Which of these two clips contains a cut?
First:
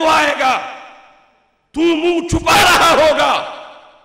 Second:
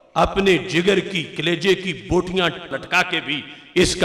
second; 1 cut; at 2.7 s

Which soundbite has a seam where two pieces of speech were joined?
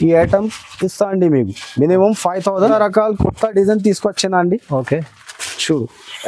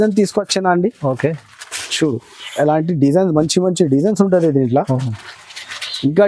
first; 1 cut; at 2.7 s

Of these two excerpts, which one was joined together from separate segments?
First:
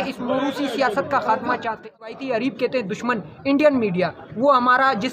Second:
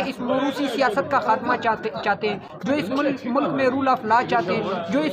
first; 1 cut; at 2.1 s

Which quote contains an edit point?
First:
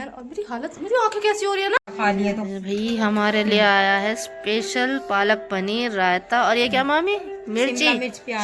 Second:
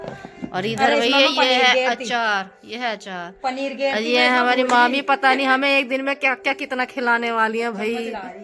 first; 1 cut; at 1.8 s

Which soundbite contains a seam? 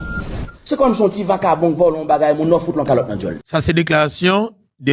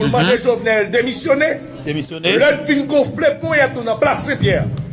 first; 1 cut; at 3.4 s

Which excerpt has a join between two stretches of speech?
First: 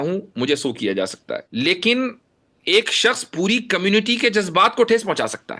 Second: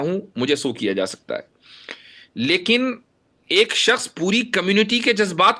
first; 1 cut; at 1.5 s

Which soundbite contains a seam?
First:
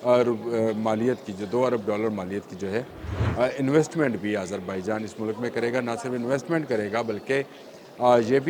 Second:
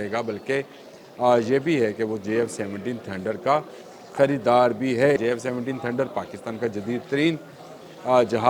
second; 1 cut; at 5.2 s

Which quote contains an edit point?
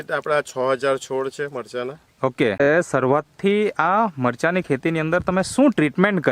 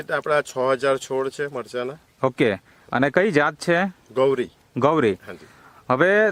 first; 1 cut; at 2.7 s

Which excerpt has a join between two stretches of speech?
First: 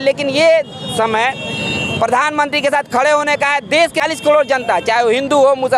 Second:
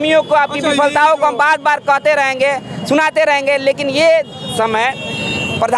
first; 1 cut; at 4.0 s

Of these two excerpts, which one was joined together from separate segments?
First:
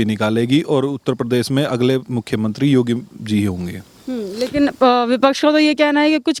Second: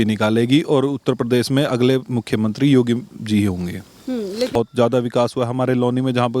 second; 1 cut; at 4.5 s

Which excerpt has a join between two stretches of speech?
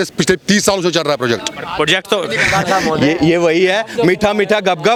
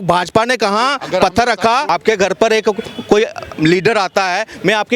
second; 1 cut; at 1.9 s

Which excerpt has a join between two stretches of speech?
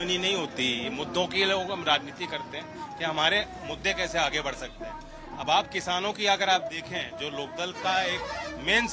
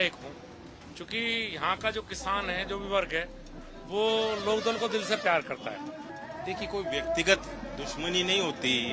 second; 1 cut; at 6.1 s

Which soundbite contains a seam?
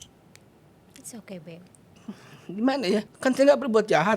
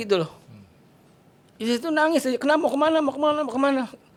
first; 2 cuts; at 0.8 s, 3.1 s

